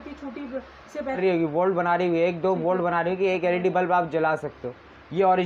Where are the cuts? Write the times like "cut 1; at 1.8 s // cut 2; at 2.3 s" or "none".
cut 1; at 1.2 s